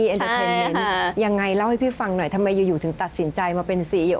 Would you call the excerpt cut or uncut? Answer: uncut